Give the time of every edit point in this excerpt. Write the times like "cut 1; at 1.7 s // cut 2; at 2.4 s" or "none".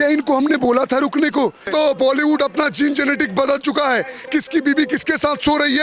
cut 1; at 1.6 s